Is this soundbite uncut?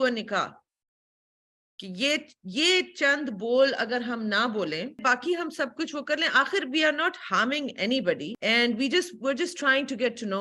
no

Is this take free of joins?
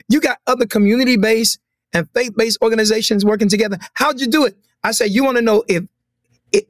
yes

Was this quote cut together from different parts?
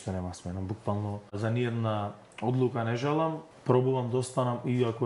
yes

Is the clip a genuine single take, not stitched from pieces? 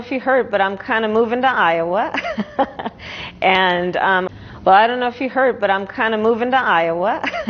no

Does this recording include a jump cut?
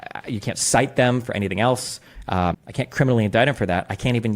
yes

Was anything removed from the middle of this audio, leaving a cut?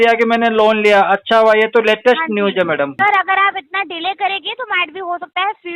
yes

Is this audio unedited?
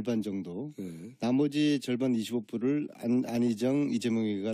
yes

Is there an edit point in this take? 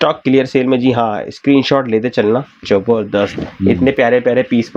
no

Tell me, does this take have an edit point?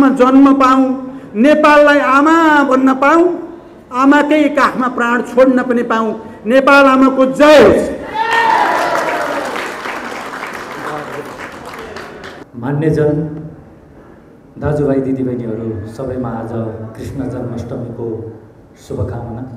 no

